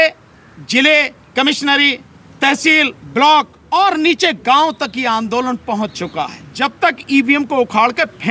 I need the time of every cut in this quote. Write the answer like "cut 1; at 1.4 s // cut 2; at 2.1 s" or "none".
cut 1; at 3.6 s // cut 2; at 6.4 s